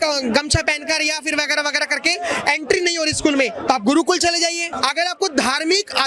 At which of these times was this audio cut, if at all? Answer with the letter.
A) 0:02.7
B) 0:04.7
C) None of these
B